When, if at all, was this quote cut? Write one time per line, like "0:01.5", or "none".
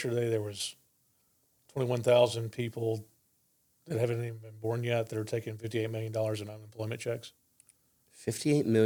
none